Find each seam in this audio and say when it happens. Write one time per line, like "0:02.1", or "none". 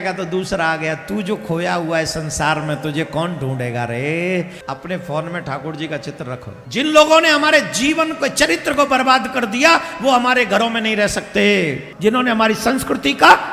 0:04.6
0:06.5
0:11.9